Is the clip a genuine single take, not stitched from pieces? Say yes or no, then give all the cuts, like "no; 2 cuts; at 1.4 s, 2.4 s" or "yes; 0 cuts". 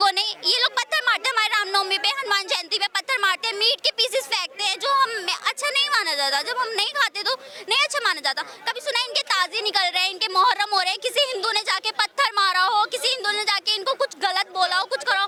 yes; 0 cuts